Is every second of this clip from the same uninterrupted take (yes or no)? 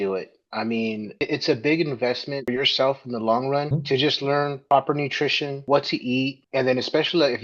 no